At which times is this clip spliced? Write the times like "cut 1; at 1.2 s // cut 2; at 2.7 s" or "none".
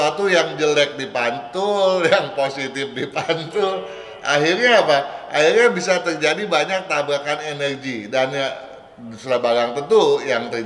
none